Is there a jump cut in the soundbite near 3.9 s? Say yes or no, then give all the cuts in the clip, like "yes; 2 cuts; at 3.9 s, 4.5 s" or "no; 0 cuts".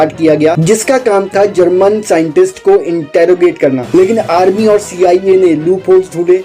yes; 1 cut; at 3.9 s